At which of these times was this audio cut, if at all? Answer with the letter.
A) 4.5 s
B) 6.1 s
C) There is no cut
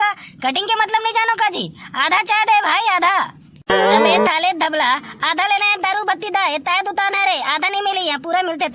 C